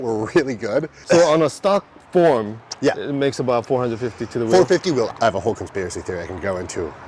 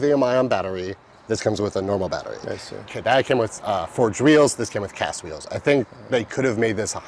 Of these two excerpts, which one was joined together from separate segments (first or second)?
first